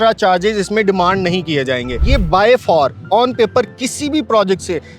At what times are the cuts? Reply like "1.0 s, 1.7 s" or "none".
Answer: 2.0 s